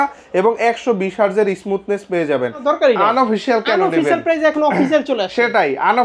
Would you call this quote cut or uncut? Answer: cut